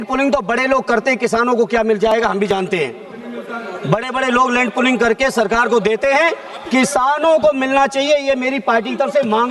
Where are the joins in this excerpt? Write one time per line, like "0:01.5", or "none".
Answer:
none